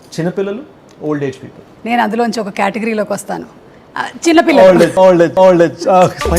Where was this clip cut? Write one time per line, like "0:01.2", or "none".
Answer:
none